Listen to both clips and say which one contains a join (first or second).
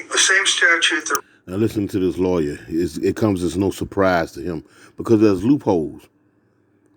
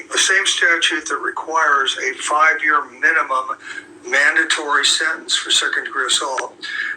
second